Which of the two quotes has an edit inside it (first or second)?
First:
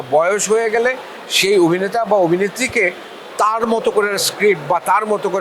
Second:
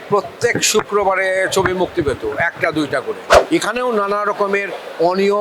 second